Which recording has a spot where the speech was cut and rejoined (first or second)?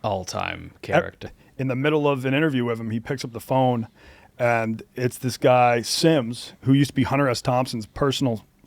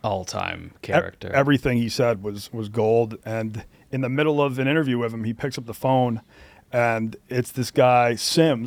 first